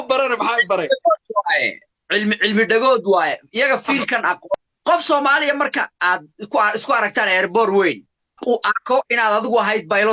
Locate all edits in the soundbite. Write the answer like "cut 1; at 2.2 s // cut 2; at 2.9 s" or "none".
cut 1; at 4.5 s // cut 2; at 8.4 s